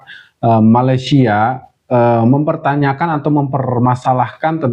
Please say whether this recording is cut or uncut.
uncut